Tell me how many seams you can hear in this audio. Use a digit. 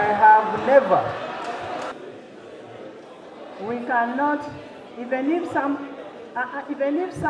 1